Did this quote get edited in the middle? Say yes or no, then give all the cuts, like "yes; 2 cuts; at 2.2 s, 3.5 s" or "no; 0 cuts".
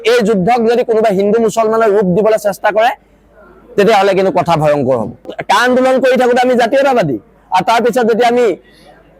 yes; 1 cut; at 5.4 s